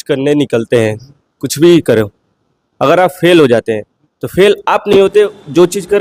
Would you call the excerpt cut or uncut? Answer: uncut